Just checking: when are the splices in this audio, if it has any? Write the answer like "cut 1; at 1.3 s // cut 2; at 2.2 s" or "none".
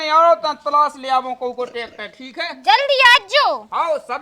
none